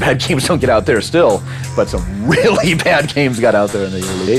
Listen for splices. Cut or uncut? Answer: uncut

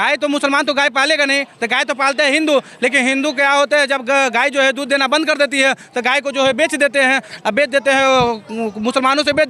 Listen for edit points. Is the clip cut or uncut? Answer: uncut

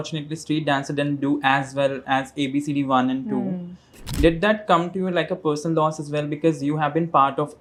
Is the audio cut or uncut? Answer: uncut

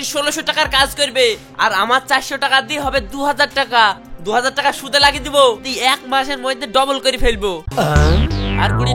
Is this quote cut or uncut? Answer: cut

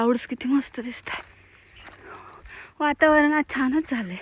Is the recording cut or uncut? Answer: uncut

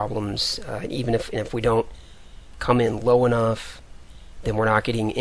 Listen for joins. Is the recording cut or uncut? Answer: cut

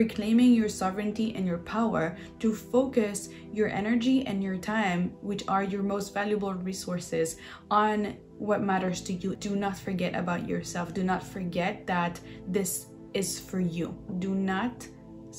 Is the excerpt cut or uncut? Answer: cut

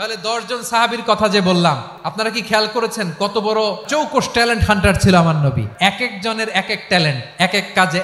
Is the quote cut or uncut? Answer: cut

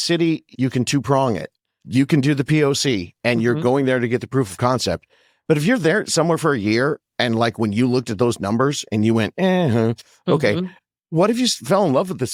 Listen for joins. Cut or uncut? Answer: uncut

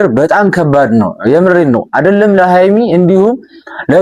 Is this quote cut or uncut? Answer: uncut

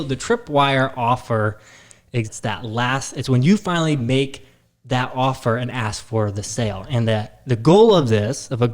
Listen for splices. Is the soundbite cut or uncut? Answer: cut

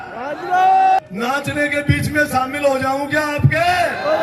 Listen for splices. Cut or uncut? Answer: cut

